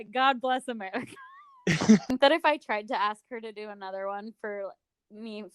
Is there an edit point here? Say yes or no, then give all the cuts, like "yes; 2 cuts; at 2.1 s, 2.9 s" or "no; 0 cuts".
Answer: yes; 1 cut; at 2.1 s